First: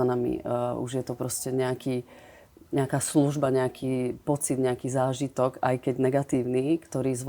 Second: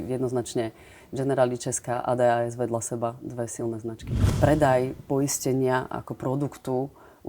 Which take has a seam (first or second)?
second